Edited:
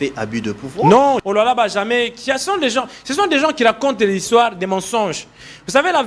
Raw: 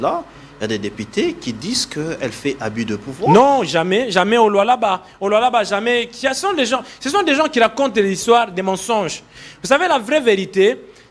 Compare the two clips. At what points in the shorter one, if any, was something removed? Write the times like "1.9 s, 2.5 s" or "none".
1.2 s